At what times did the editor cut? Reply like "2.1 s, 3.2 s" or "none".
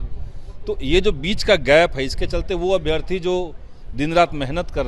none